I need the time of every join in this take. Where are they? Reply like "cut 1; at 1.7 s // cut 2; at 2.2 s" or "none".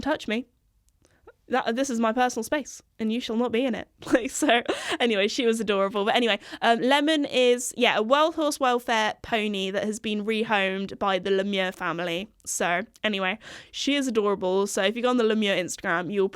none